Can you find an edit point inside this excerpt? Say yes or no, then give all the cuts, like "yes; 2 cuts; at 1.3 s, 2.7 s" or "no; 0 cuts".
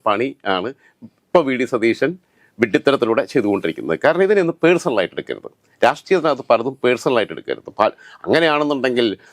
no; 0 cuts